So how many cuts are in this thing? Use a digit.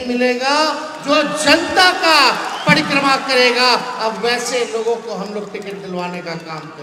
0